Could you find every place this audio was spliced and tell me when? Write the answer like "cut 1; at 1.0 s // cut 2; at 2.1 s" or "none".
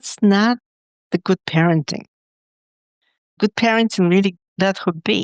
cut 1; at 3.4 s